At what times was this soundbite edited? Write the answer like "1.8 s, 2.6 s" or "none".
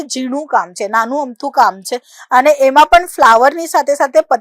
none